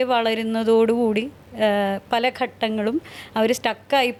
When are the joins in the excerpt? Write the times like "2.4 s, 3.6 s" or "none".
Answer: none